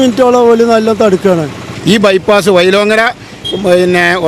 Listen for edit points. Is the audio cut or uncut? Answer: cut